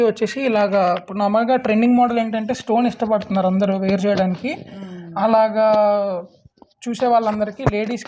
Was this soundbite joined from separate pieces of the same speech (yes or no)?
no